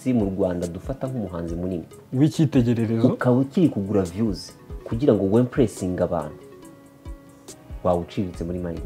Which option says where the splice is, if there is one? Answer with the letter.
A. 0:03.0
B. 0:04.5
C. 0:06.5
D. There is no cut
D